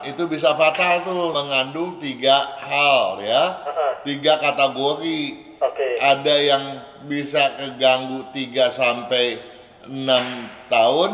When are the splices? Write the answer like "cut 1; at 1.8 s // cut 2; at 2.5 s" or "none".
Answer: cut 1; at 1.3 s